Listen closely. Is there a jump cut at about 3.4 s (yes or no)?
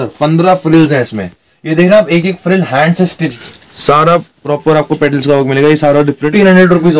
yes